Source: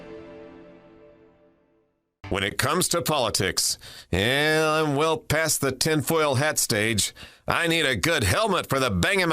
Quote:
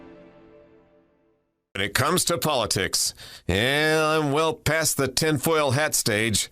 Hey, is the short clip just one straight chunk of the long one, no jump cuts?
no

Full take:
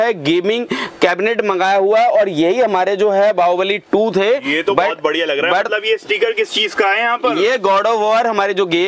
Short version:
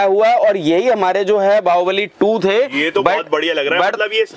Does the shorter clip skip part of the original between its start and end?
no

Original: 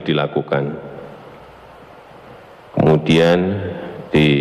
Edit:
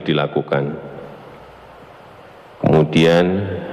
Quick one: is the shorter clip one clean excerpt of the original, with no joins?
no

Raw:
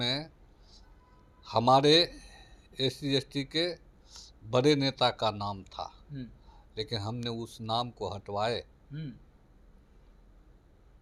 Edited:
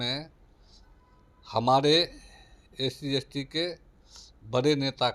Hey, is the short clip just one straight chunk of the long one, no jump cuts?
yes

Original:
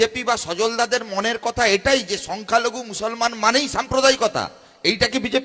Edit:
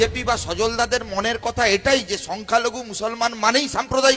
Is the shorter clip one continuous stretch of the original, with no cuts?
yes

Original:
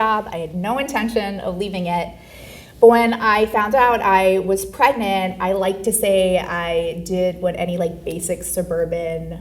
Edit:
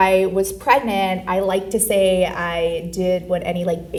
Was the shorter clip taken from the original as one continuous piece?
yes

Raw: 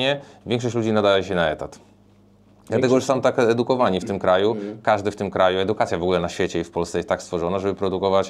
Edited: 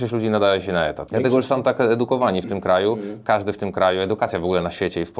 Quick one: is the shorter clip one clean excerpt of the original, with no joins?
no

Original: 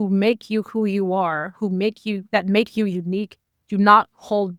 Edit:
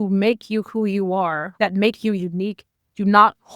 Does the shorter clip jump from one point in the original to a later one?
yes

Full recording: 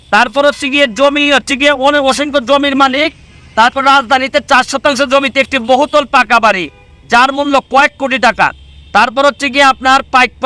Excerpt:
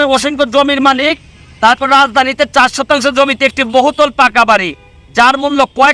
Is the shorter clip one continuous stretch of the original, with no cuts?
yes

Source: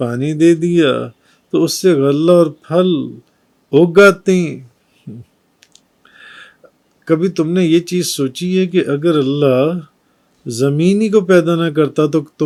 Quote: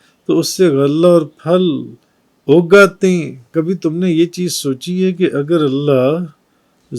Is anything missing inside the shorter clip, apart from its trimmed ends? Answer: yes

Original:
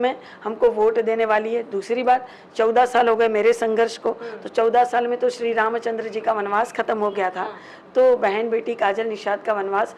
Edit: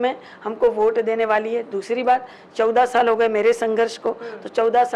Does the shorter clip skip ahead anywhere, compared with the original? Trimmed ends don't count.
no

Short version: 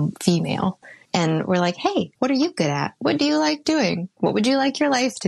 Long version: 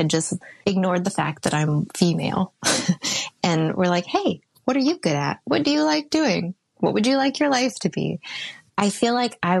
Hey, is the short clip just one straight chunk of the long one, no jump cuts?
no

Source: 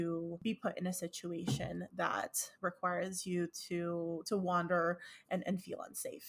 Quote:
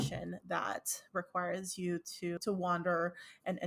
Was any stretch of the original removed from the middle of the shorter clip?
yes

